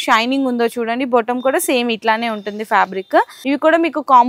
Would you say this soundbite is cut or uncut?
cut